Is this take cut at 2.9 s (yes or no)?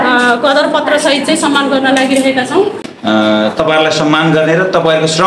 yes